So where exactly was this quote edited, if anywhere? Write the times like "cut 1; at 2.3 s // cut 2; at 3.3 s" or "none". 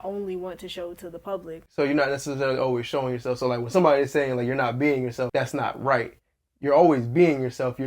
cut 1; at 1.6 s // cut 2; at 5.3 s